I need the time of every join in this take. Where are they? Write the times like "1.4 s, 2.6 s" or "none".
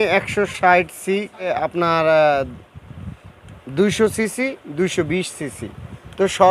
1.5 s

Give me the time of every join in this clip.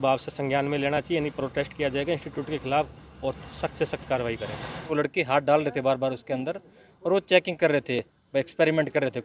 4.9 s

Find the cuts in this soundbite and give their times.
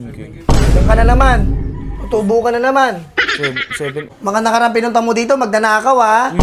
4.1 s

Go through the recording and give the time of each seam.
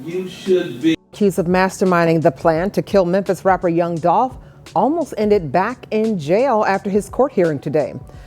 0.9 s

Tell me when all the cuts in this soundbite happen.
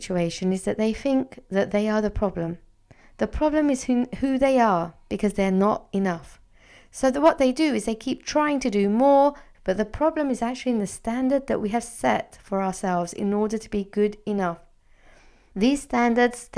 9.5 s, 15.4 s

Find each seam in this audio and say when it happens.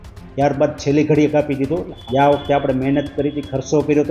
1.9 s

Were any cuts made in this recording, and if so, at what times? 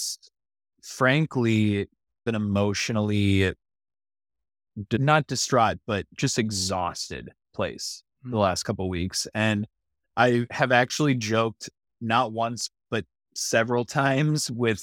none

